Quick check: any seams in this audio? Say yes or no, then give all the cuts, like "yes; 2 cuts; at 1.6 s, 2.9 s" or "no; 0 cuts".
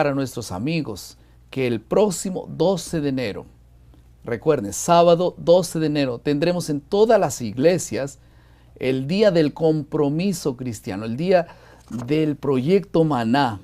yes; 1 cut; at 6.8 s